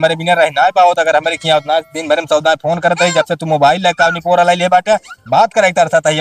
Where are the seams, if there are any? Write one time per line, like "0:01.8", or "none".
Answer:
none